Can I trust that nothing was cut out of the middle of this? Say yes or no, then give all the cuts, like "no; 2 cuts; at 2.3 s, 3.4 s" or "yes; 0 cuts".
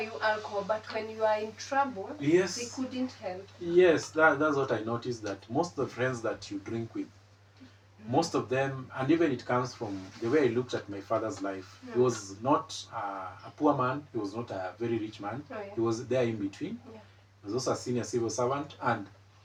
yes; 0 cuts